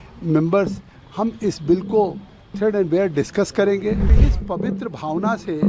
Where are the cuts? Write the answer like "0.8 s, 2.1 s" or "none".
4.1 s